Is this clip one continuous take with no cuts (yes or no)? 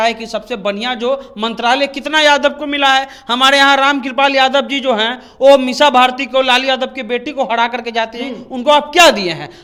yes